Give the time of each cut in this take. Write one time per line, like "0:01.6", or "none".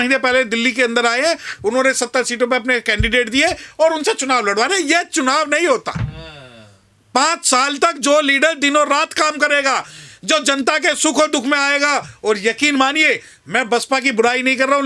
none

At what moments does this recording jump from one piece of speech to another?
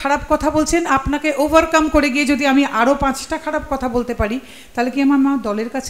none

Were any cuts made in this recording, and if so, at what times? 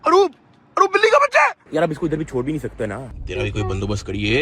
0:01.6
0:03.0

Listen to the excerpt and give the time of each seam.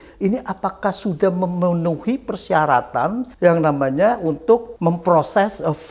0:03.3
0:04.7

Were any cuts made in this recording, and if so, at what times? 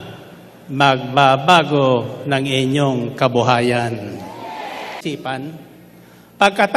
0:05.0

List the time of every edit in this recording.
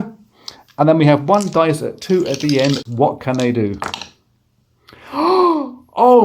0:02.8

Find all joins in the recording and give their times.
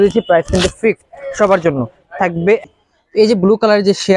0:02.6

